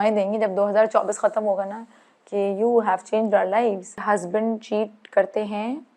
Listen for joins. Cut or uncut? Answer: cut